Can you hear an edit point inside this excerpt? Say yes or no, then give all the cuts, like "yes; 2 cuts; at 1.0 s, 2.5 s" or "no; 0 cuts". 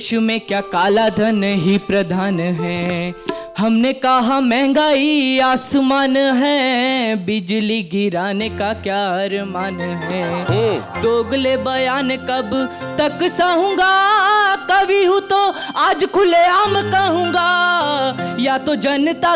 no; 0 cuts